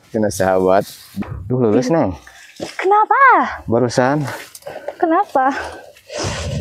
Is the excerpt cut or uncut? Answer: cut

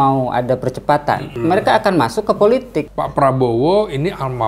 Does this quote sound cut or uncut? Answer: cut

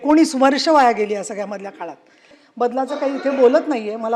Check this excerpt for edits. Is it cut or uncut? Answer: cut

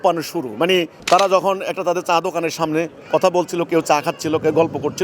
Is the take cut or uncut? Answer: cut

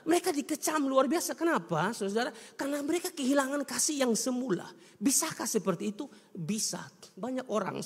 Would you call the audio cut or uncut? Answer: uncut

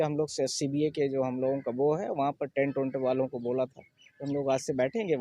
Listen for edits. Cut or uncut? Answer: uncut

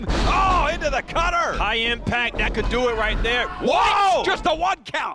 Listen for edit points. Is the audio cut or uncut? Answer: cut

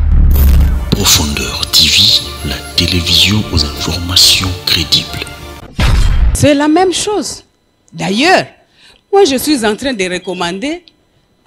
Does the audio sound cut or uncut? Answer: cut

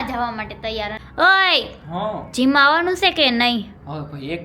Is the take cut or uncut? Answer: cut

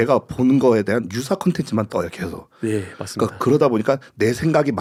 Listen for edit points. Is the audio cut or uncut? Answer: uncut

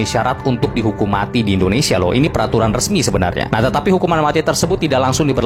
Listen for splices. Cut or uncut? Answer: uncut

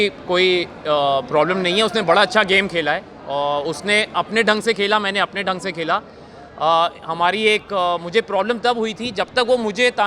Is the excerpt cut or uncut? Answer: uncut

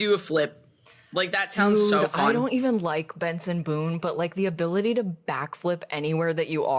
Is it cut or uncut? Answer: uncut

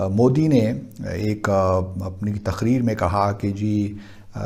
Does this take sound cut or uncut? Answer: uncut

